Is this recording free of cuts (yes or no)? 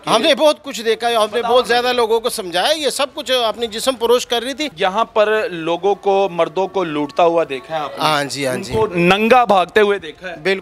no